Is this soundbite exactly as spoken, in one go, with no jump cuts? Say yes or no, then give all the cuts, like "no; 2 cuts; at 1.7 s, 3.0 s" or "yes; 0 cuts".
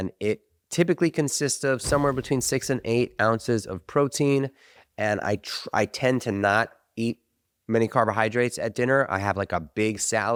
yes; 0 cuts